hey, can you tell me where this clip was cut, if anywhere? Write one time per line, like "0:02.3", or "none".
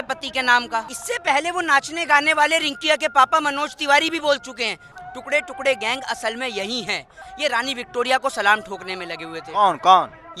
0:00.9
0:04.9
0:07.3